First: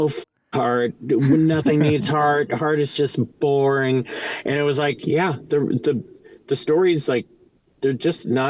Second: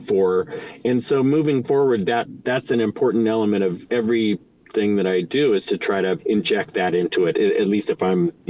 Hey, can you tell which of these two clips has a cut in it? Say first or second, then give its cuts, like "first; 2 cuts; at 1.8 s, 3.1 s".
second; 3 cuts; at 2.3 s, 3.8 s, 6.2 s